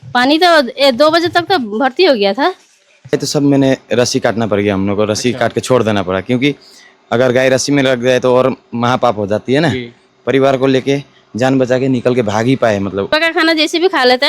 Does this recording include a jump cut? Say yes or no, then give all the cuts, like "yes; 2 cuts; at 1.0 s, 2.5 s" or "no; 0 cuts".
yes; 3 cuts; at 3.1 s, 10.1 s, 13.1 s